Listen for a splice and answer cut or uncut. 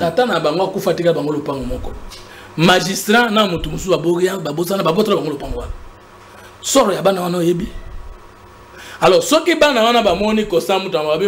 uncut